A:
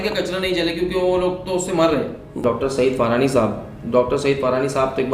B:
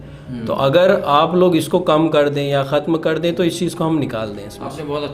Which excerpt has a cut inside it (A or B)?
A